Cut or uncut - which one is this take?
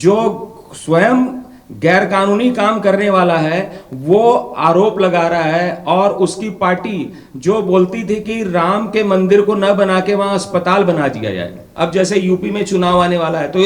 cut